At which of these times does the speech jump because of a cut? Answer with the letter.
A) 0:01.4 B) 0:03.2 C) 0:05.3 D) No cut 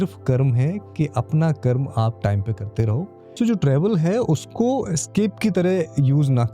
B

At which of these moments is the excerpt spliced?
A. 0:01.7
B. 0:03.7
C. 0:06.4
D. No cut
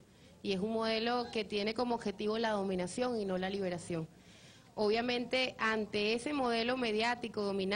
A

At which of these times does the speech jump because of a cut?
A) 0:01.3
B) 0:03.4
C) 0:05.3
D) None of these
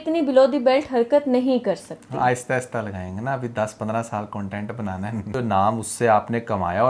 C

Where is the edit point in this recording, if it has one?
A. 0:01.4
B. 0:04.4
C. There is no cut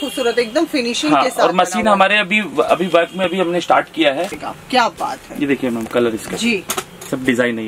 B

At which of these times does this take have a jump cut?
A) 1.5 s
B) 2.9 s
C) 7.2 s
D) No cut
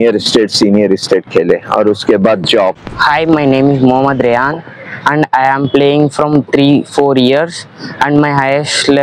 B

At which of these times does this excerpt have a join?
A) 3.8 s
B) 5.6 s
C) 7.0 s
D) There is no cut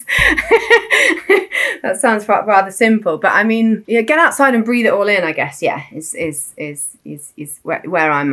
A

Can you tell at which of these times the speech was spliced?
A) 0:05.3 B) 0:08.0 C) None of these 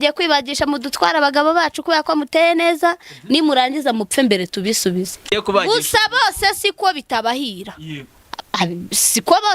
A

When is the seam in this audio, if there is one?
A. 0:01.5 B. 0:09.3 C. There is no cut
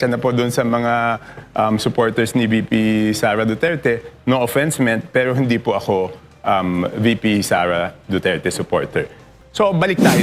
B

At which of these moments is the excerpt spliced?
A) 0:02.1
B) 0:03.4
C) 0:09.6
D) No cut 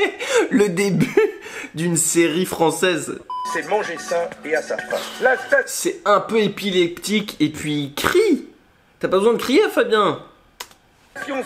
B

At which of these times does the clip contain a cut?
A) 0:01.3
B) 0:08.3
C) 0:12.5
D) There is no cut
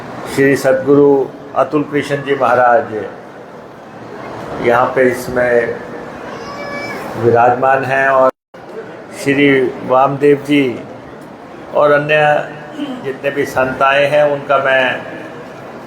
B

